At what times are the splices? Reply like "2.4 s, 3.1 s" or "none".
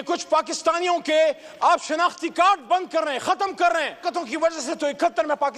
4.0 s